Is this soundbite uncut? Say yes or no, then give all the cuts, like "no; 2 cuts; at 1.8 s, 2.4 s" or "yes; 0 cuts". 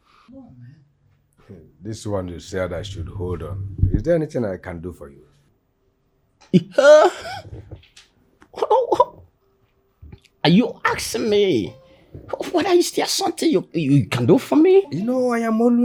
yes; 0 cuts